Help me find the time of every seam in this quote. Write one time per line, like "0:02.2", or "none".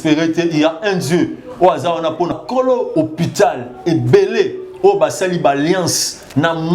0:02.3